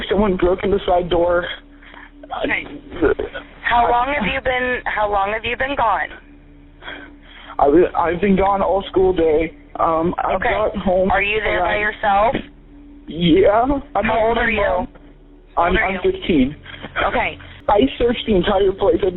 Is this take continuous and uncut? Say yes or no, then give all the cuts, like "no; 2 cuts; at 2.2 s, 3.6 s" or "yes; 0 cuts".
no; 1 cut; at 17.4 s